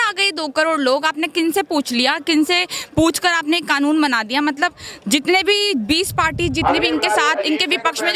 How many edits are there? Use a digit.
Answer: 0